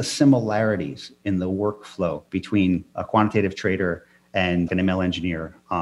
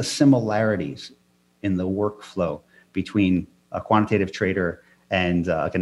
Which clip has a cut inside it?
first; 3 cuts; at 1.0 s, 2.6 s, 4.7 s

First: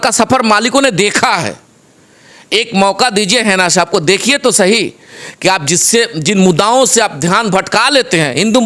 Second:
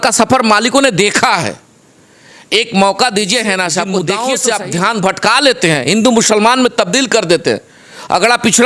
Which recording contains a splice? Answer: second; 1 cut; at 3.9 s

